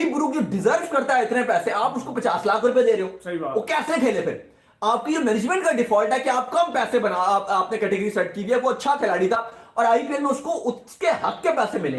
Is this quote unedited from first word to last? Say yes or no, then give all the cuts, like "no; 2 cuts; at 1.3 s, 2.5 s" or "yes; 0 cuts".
yes; 0 cuts